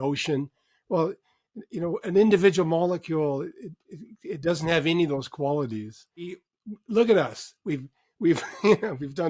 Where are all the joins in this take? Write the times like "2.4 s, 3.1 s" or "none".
6.5 s